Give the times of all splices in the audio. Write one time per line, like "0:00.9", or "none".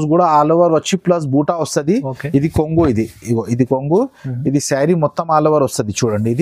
none